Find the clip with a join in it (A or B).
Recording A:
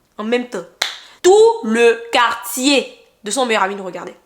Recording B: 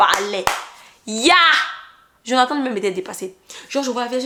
A